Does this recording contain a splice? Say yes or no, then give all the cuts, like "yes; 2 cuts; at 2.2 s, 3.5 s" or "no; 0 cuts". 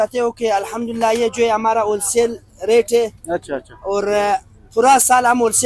no; 0 cuts